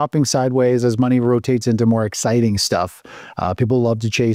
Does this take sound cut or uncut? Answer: uncut